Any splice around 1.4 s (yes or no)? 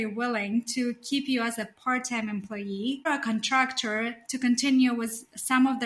no